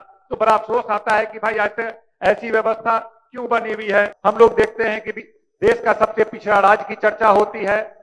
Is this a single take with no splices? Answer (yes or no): no